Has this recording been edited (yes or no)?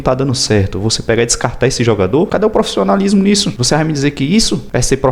no